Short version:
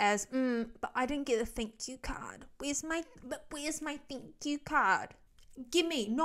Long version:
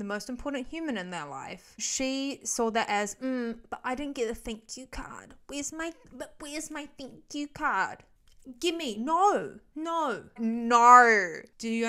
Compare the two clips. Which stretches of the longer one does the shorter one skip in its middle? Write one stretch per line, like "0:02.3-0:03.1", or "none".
none